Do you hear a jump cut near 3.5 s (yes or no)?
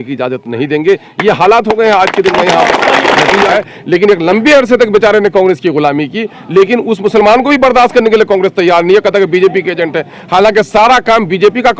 yes